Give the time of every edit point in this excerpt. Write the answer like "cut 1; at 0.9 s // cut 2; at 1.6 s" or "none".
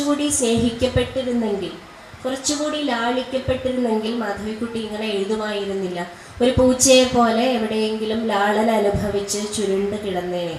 none